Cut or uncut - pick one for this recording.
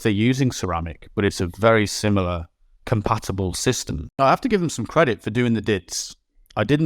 cut